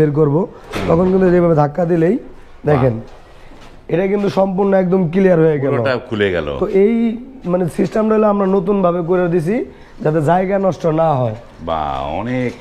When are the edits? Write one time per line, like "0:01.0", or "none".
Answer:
none